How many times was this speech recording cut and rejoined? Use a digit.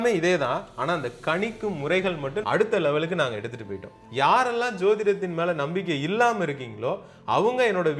2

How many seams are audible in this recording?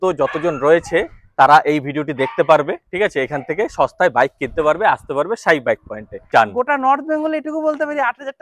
1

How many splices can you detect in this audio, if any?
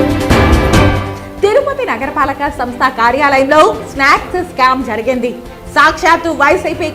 1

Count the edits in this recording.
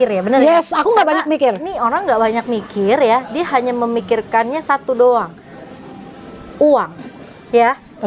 0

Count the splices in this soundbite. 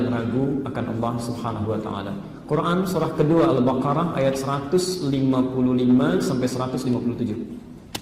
0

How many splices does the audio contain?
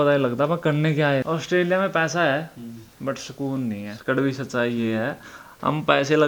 2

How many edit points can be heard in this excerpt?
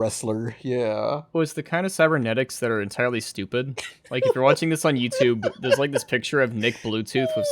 1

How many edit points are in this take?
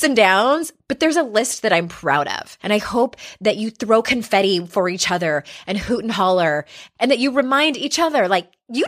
2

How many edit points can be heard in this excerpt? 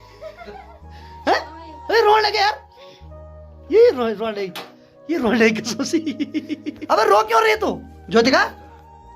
2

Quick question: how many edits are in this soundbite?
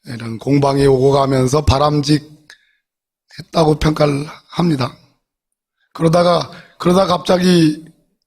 1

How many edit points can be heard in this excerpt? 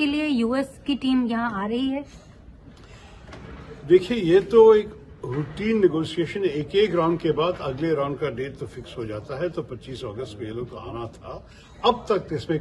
0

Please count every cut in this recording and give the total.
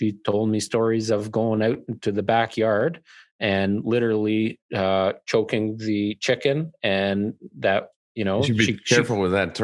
0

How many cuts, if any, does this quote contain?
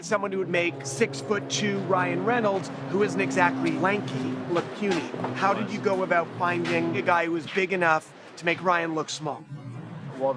0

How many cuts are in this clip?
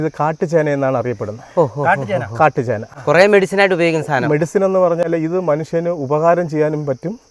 0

